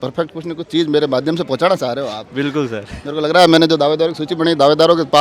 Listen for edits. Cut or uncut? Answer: uncut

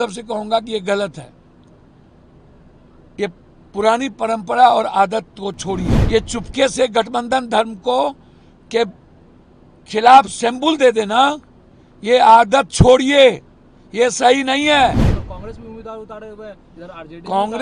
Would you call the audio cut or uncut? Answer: cut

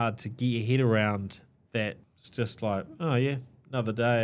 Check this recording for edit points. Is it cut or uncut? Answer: cut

